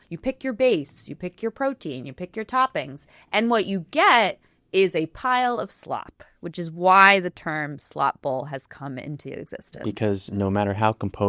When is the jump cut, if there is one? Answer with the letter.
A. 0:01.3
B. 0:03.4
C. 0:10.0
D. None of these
D